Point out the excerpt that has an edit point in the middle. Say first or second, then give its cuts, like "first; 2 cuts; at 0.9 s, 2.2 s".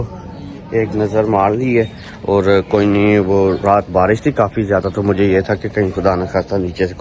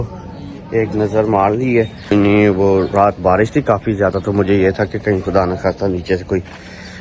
second; 1 cut; at 2.1 s